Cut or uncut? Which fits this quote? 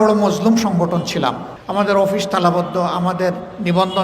cut